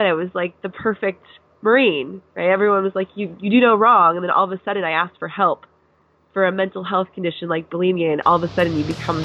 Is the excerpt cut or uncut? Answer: uncut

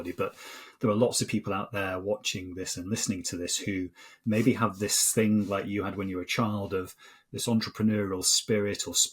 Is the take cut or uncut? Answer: uncut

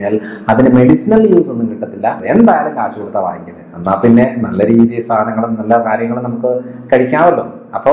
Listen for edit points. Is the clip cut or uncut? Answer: cut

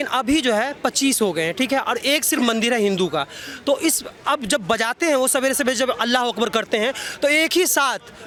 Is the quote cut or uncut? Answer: uncut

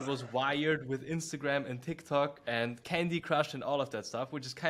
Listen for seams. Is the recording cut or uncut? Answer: cut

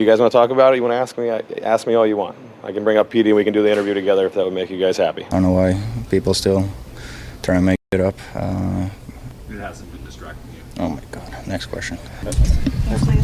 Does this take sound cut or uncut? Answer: cut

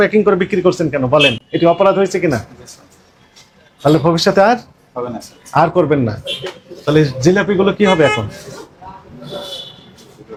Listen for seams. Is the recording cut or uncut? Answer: uncut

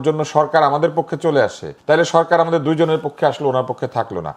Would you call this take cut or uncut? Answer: cut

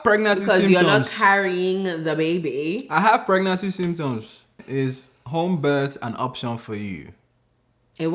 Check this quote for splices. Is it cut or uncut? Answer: cut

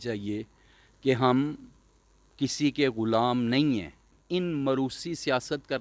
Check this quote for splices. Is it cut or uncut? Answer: cut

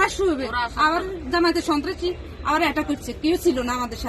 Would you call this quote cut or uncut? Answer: uncut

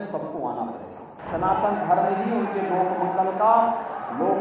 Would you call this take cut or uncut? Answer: cut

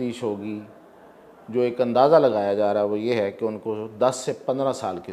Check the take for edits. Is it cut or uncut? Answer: uncut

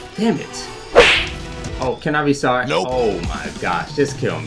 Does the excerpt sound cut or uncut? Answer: uncut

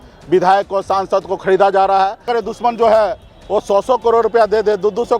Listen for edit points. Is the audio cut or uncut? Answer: cut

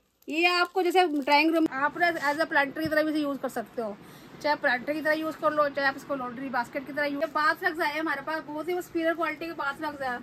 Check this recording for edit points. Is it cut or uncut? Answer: cut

